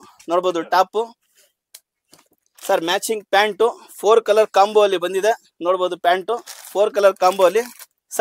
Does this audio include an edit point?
no; 0 cuts

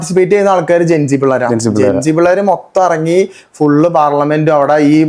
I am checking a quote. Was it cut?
no; 0 cuts

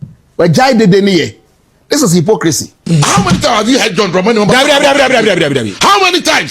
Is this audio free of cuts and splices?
no; 1 cut; at 2.8 s

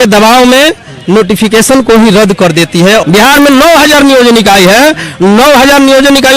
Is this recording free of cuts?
no; 1 cut; at 3.0 s

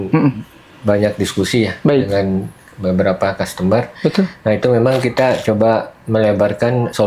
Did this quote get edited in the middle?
no; 0 cuts

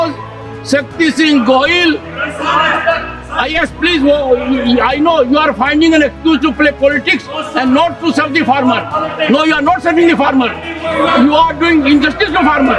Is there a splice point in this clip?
no; 0 cuts

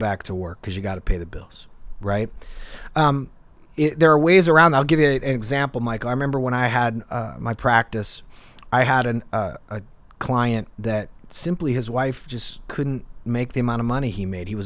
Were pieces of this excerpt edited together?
no; 0 cuts

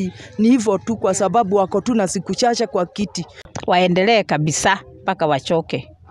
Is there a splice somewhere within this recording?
yes; 1 cut; at 3.4 s

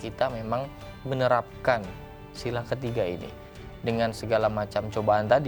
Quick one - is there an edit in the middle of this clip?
no; 0 cuts

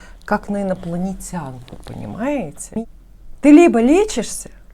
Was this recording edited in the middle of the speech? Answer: yes; 1 cut; at 2.5 s

